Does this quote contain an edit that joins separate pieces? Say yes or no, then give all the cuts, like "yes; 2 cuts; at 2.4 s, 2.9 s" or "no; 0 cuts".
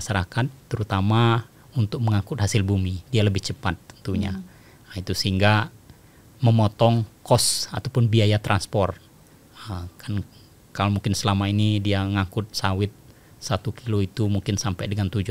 no; 0 cuts